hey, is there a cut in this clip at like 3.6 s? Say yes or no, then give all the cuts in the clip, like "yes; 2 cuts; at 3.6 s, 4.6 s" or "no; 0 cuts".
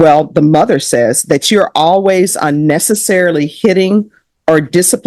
no; 0 cuts